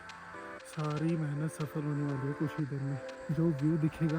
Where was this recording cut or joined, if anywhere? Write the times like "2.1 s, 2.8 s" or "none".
3.1 s